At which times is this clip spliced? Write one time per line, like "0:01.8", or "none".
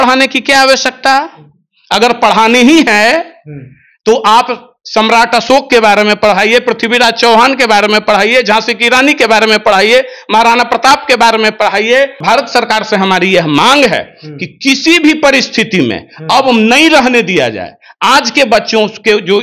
0:12.2